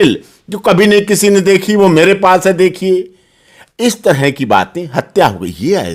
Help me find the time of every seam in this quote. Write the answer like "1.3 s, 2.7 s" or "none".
none